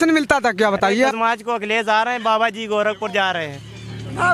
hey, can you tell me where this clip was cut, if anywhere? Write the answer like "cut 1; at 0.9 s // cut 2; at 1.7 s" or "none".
cut 1; at 1.1 s